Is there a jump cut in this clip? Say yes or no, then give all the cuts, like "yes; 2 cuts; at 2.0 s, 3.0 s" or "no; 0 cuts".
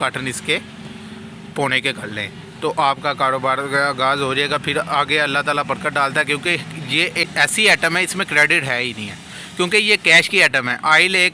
yes; 1 cut; at 7.2 s